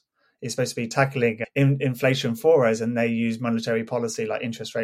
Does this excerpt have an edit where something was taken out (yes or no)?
yes